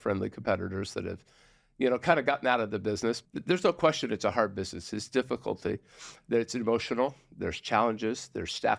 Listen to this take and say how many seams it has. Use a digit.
1